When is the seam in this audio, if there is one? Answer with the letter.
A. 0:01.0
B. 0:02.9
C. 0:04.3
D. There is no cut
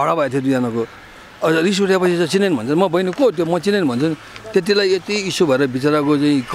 D